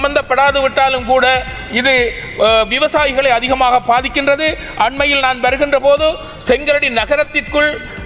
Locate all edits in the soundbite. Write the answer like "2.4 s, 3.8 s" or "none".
none